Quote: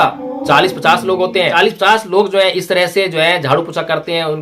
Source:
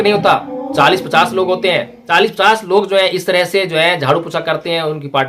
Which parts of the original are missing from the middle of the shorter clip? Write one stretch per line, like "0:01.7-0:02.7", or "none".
0:01.8-0:02.1